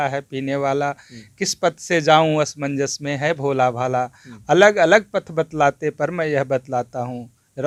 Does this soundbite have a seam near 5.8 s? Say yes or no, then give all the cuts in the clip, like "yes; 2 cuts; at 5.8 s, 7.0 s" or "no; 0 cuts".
no; 0 cuts